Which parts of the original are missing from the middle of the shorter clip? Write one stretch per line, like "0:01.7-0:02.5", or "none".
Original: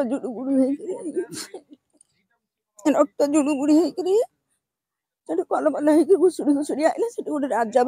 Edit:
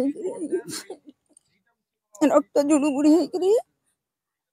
none